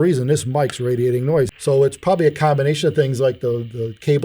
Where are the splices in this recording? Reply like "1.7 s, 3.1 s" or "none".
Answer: 1.5 s